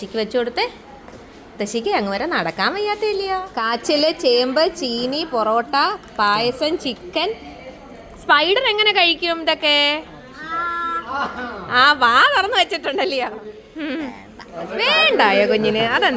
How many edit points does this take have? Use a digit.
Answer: 2